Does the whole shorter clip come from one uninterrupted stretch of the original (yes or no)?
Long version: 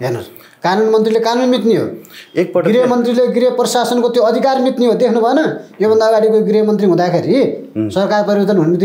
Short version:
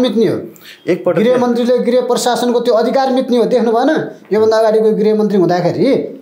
yes